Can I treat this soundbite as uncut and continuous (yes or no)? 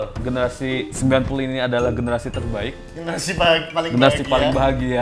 yes